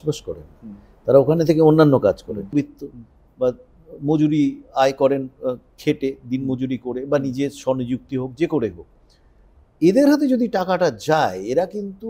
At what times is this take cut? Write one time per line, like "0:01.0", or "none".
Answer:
0:02.5